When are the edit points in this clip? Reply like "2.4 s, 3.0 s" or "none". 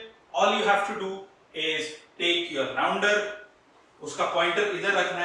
none